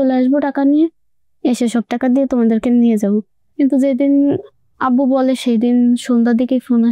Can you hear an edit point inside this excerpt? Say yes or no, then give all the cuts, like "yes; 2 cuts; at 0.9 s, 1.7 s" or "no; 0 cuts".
no; 0 cuts